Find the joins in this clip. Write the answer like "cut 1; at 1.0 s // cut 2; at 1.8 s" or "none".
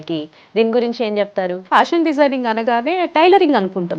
cut 1; at 1.6 s